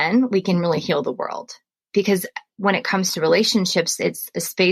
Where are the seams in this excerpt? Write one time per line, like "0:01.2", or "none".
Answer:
0:02.5